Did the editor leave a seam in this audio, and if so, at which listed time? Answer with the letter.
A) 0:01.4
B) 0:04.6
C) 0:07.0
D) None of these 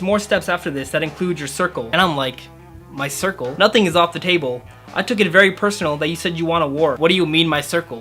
C